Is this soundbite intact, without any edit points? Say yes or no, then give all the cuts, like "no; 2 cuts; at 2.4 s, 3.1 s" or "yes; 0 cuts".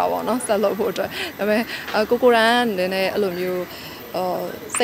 yes; 0 cuts